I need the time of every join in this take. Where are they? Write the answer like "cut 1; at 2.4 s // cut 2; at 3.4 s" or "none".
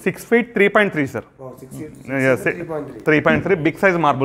none